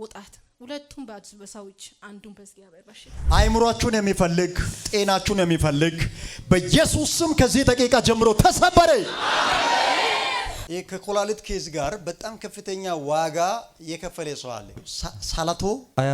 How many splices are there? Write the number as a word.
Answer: three